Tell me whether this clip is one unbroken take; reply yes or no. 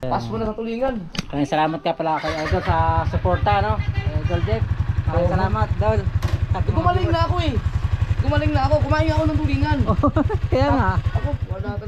yes